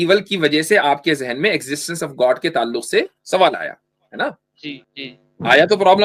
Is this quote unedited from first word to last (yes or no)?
no